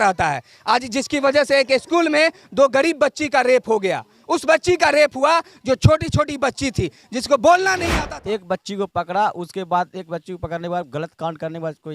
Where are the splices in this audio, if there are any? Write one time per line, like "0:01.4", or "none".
0:07.9